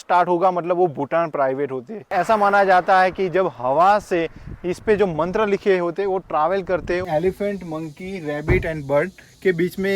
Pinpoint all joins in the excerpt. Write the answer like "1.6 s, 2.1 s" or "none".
2.1 s, 7.0 s